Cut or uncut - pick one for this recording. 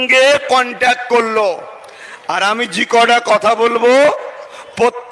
uncut